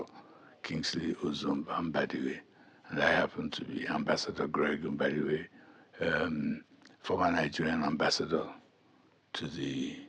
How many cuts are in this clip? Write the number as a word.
zero